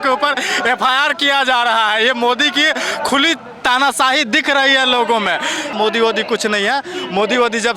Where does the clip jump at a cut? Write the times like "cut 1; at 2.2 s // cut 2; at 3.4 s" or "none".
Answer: cut 1; at 5.7 s